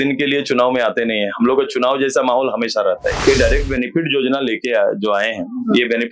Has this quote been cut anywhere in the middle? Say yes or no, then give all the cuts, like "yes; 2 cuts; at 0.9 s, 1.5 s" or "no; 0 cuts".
yes; 1 cut; at 3.2 s